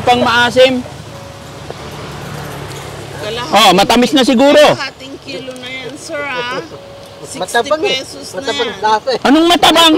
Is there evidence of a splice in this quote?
no; 0 cuts

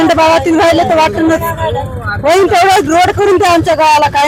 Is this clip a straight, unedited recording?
yes; 0 cuts

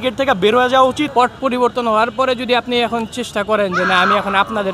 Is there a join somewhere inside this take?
yes; 1 cut; at 1.1 s

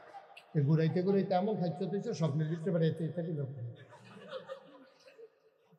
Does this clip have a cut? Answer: no; 0 cuts

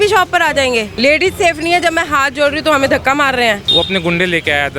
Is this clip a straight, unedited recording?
no; 2 cuts; at 0.9 s, 3.6 s

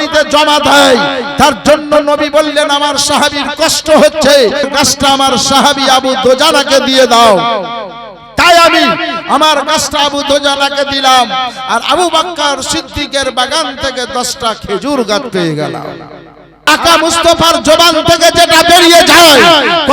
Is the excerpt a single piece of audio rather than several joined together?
no; 2 cuts; at 4.7 s, 16.7 s

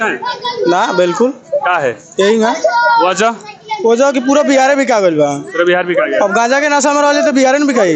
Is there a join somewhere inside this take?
no; 0 cuts

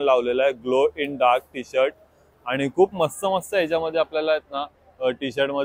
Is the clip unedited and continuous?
yes; 0 cuts

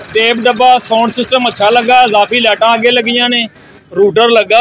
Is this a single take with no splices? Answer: yes; 0 cuts

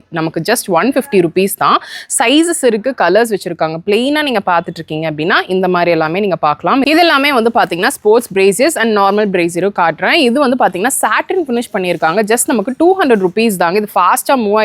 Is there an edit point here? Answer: yes; 1 cut; at 6.8 s

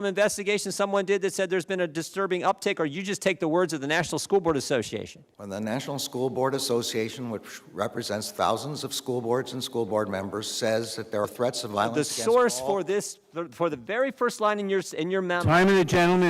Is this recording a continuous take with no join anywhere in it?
no; 1 cut; at 11.2 s

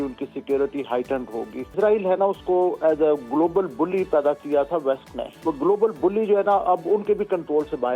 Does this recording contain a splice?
yes; 2 cuts; at 1.7 s, 5.4 s

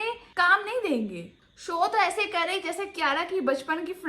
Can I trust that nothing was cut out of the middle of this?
no; 1 cut; at 1.3 s

